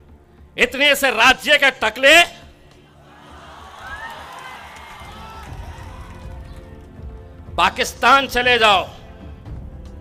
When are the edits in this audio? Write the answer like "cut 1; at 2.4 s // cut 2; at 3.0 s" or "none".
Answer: none